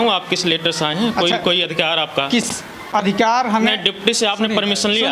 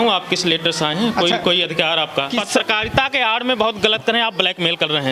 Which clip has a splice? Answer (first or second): second